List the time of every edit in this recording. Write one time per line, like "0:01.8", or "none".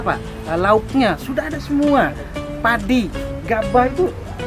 none